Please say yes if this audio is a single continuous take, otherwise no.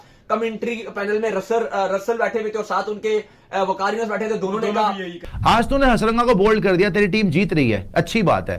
no